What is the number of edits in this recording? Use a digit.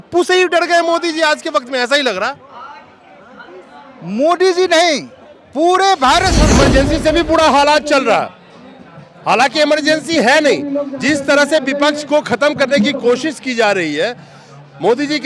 1